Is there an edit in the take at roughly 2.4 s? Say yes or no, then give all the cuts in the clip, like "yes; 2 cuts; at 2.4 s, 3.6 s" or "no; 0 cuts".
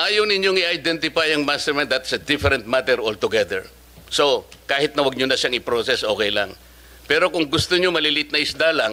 no; 0 cuts